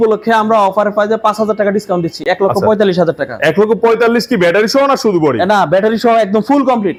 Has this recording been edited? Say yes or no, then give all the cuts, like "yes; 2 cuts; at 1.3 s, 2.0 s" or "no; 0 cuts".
no; 0 cuts